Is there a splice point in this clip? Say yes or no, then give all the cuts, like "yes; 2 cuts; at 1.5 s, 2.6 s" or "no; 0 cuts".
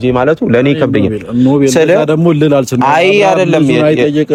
no; 0 cuts